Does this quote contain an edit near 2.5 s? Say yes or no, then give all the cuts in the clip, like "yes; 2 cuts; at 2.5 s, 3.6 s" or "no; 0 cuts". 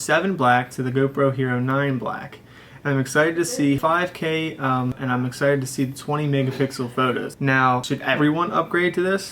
no; 3 cuts; at 3.8 s, 5.0 s, 7.8 s